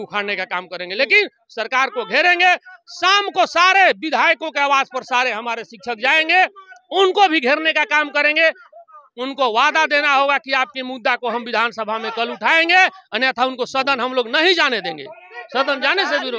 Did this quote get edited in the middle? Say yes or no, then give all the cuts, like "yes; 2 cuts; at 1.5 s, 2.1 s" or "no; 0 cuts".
no; 0 cuts